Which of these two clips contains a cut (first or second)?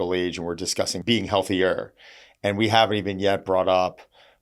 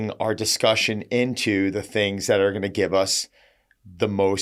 first